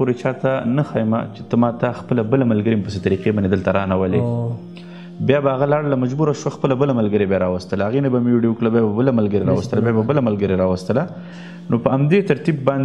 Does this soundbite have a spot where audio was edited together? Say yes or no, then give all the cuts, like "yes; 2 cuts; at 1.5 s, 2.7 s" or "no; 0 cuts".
no; 0 cuts